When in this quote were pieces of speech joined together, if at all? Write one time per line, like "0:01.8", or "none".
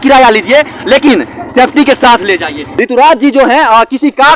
0:02.6